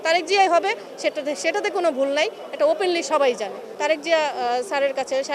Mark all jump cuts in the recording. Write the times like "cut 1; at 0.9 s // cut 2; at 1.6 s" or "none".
cut 1; at 3.7 s